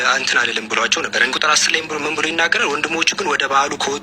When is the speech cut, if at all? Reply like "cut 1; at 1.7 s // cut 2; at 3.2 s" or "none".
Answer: cut 1; at 1.3 s